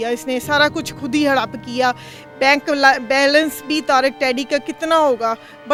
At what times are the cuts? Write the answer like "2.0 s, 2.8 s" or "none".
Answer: none

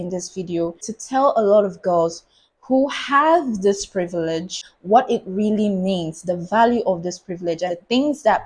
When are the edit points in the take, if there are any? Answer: 0.9 s, 4.6 s

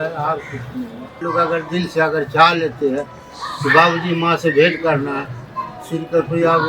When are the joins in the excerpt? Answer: 1.2 s

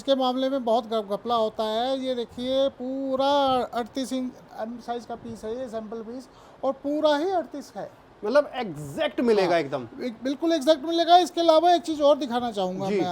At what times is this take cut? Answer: none

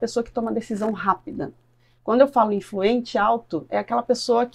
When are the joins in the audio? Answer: none

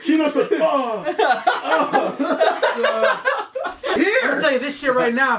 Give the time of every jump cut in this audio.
3.9 s

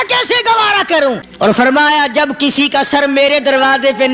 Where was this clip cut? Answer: 1.2 s

